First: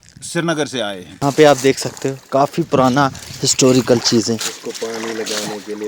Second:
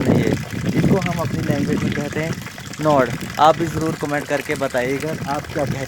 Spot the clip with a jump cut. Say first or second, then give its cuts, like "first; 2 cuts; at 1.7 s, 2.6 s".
first; 1 cut; at 1.1 s